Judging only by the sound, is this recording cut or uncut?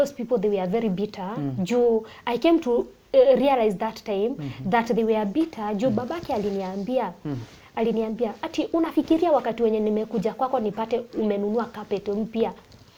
uncut